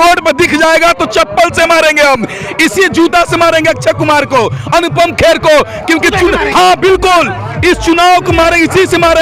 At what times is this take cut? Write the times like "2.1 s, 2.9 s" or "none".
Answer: none

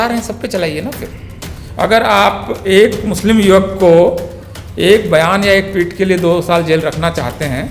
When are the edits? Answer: none

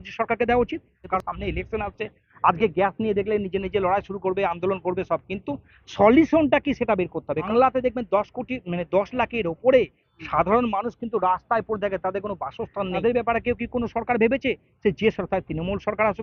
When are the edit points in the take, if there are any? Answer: 1.1 s, 7.5 s, 13.0 s

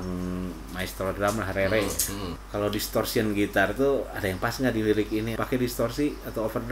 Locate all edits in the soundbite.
2.3 s, 5.3 s

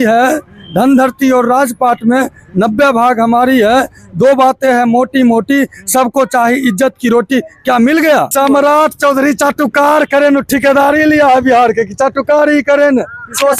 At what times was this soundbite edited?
8.3 s

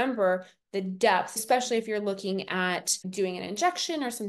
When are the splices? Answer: 1.4 s, 3.0 s

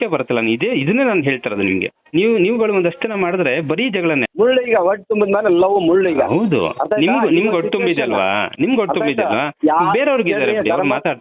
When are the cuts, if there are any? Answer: 4.3 s

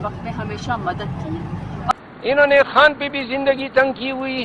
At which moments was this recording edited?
1.7 s

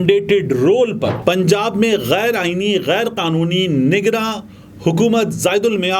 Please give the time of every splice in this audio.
1.1 s

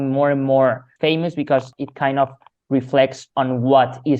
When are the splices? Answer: 0.9 s, 1.7 s

